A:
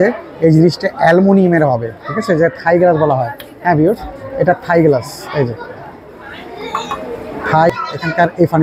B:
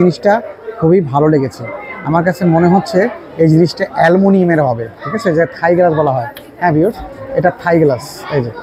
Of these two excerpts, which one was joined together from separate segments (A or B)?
A